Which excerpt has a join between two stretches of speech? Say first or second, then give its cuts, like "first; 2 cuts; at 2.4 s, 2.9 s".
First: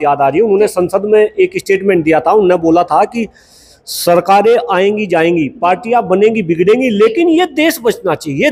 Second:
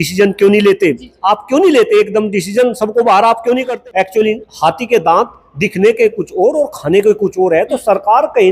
second; 1 cut; at 3.7 s